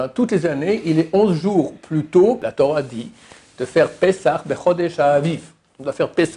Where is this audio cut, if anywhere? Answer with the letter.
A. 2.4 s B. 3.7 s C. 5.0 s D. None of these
A